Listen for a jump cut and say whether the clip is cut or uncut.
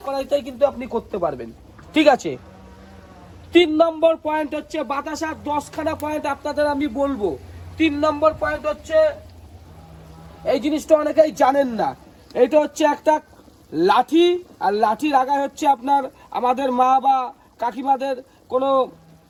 uncut